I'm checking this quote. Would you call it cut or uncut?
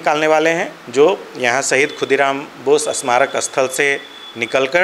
uncut